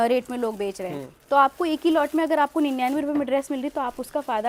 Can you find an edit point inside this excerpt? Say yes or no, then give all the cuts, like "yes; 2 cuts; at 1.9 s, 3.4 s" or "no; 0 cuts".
no; 0 cuts